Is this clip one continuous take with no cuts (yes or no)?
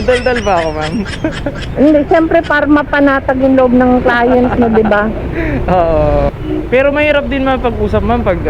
yes